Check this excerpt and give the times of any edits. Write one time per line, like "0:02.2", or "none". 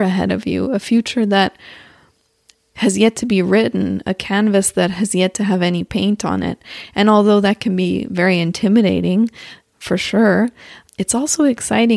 none